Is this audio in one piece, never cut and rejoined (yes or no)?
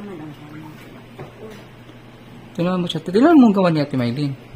yes